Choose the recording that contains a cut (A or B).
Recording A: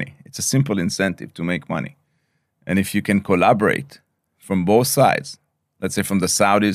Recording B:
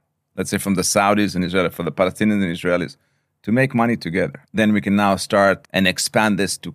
B